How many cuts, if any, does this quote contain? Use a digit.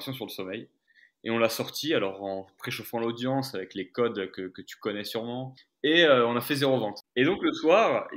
2